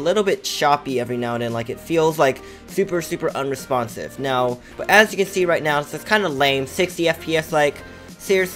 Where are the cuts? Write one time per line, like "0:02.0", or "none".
0:04.7